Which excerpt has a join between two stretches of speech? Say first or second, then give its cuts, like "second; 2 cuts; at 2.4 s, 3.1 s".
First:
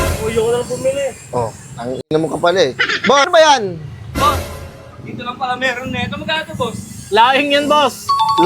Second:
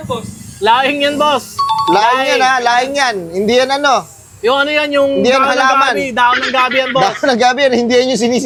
first; 1 cut; at 3.3 s